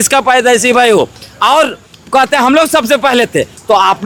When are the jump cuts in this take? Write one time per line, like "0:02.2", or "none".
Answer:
none